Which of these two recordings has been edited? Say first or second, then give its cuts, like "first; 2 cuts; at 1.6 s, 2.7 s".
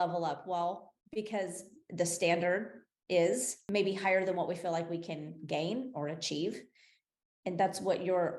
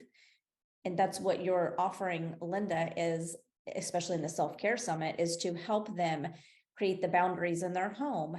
first; 2 cuts; at 0.9 s, 3.5 s